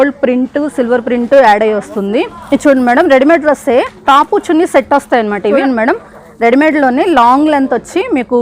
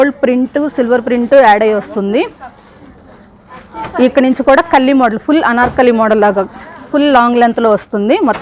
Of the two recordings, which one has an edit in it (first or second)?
first